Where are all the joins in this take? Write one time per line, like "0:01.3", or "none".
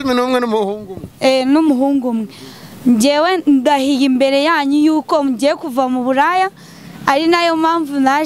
none